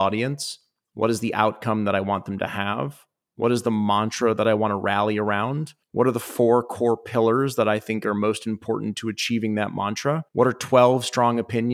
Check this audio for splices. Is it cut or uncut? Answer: cut